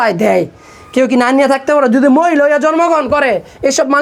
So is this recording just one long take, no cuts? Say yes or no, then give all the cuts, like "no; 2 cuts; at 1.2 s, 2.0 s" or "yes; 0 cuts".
yes; 0 cuts